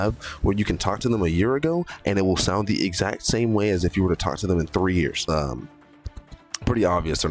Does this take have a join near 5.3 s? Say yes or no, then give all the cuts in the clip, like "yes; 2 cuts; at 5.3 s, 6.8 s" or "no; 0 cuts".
yes; 1 cut; at 5.3 s